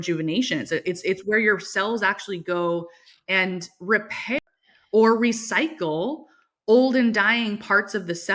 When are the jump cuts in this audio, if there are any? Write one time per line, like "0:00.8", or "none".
0:04.4

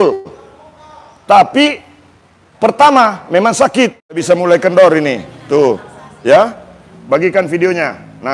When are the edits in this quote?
0:04.2

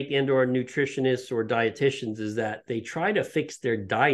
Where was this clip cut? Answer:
none

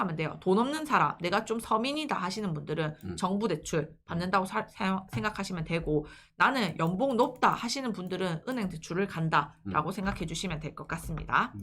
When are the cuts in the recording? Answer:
none

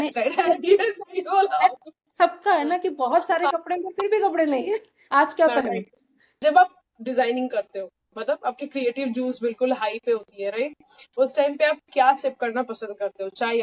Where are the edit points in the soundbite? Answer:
none

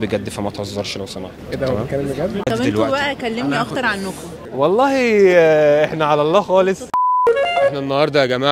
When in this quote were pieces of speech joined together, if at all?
none

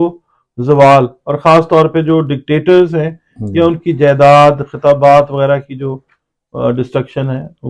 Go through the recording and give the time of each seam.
none

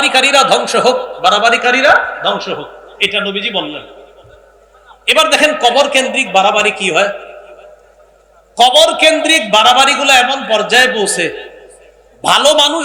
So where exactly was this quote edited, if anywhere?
none

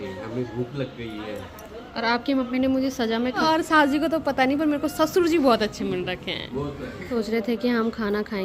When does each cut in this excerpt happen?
0:03.4
0:07.1

